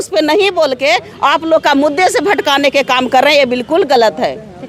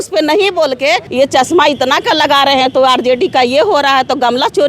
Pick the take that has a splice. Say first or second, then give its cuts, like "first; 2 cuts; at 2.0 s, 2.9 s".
second; 1 cut; at 1.1 s